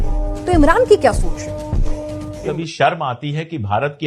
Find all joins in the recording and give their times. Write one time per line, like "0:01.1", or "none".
0:02.3